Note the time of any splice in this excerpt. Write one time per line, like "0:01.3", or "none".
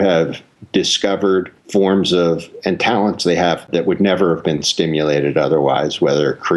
0:03.6

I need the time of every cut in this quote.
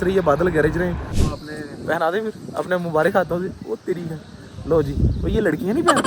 0:01.0

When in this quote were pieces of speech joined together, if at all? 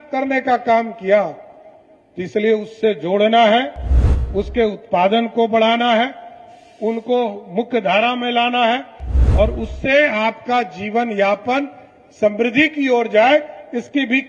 none

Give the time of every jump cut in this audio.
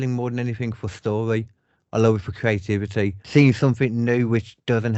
0:03.2

